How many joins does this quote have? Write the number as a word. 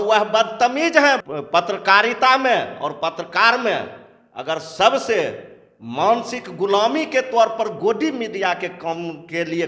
one